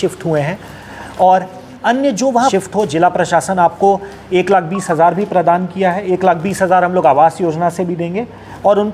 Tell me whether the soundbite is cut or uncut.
cut